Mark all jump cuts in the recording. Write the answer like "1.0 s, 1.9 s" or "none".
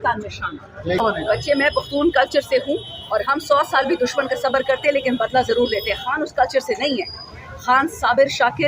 1.0 s